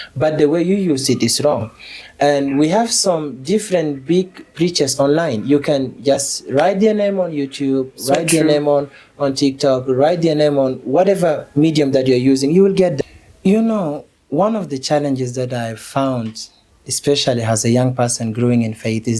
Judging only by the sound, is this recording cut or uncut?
cut